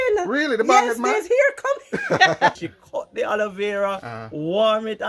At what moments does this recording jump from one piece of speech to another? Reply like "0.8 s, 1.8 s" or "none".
2.6 s